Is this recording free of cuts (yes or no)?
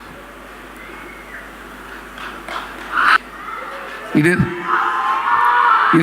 no